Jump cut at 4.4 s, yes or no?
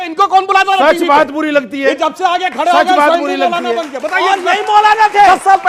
no